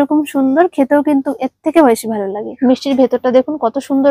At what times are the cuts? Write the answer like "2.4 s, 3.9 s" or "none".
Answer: 2.4 s